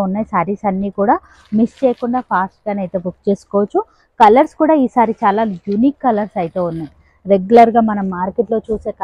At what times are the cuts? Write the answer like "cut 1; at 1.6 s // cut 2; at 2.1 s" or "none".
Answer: none